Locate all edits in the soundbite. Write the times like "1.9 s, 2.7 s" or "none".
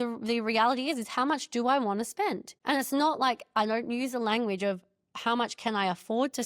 2.5 s